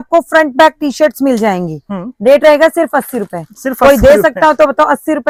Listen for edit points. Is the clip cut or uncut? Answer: uncut